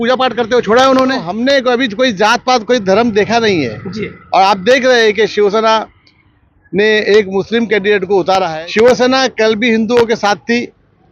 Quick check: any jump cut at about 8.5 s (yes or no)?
yes